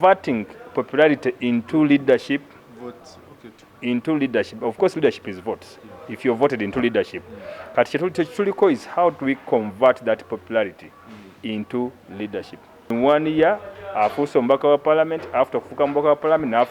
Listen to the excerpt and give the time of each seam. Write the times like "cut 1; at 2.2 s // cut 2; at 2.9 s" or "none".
cut 1; at 12.9 s